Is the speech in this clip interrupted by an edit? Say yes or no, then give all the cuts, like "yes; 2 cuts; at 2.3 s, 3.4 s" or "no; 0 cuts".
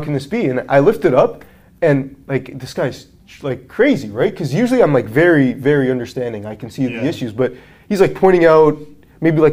no; 0 cuts